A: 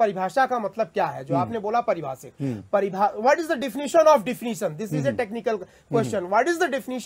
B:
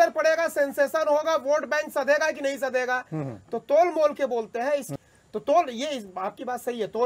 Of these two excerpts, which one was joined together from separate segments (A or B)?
B